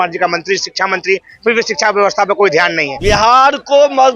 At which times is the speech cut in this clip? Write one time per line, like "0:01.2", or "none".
0:02.9